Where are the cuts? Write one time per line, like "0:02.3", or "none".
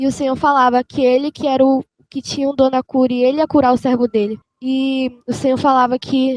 0:04.5